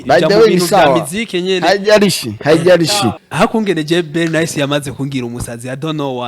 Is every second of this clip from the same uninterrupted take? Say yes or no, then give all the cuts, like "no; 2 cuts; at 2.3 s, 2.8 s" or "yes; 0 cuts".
no; 1 cut; at 3.1 s